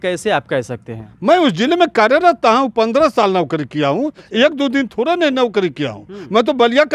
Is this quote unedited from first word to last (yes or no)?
yes